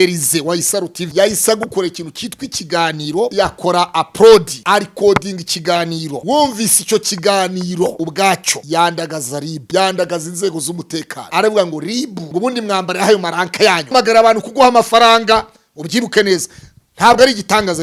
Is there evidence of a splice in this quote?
yes; 9 cuts; at 1.0 s, 3.3 s, 4.5 s, 6.1 s, 8.1 s, 9.6 s, 11.2 s, 12.2 s, 13.9 s

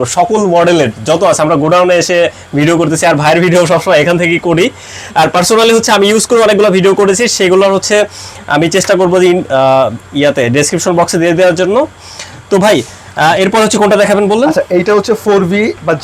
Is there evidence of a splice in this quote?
no; 0 cuts

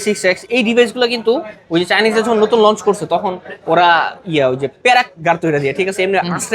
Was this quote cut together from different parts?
no; 0 cuts

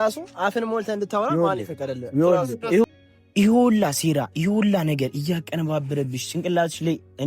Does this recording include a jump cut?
yes; 1 cut; at 2.8 s

